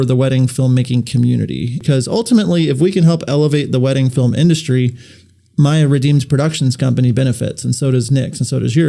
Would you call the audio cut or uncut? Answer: cut